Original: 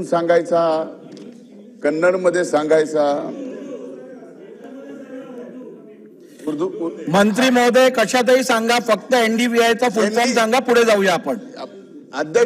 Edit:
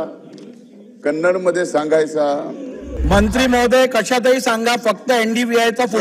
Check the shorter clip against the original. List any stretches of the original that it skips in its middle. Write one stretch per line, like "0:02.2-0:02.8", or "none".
0:03.7-0:07.0